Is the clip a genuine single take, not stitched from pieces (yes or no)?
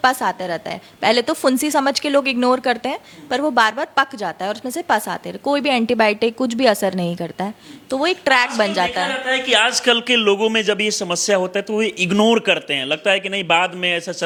yes